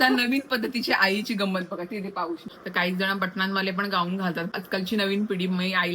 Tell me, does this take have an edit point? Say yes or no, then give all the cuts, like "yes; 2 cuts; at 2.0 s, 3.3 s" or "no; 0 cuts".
yes; 2 cuts; at 2.5 s, 4.5 s